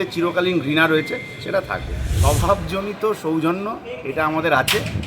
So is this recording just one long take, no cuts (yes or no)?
no